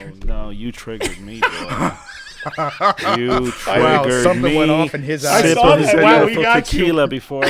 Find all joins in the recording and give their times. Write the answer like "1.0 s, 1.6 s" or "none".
none

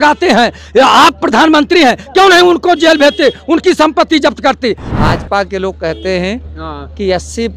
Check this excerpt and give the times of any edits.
4.8 s

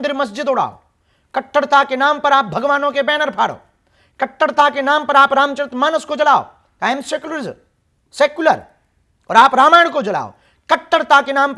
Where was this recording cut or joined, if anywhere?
none

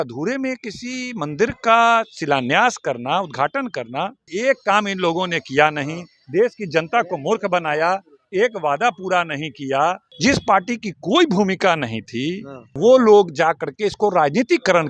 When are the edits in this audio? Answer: 4.2 s, 10.1 s, 12.7 s

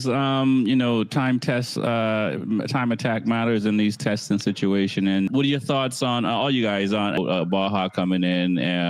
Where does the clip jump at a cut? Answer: 5.3 s, 7.2 s

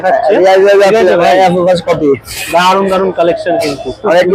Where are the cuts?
none

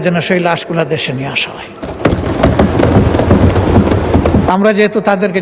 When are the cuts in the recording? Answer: 4.5 s

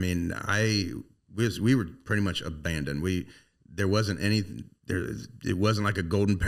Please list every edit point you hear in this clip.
none

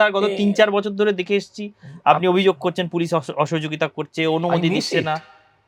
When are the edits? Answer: none

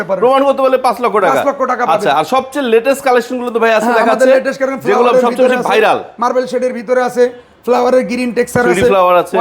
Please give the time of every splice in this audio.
none

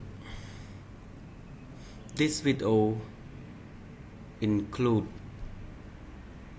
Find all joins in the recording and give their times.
1.0 s

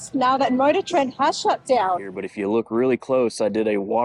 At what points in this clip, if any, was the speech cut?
2.3 s

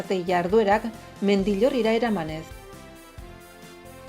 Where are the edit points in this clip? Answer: 2.5 s

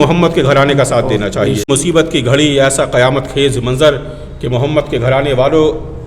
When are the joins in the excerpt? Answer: 1.7 s

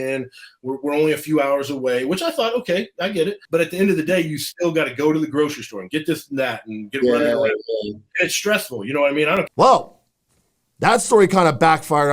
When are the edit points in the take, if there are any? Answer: 9.5 s

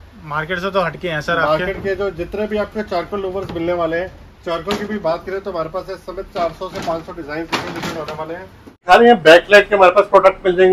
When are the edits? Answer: 8.7 s

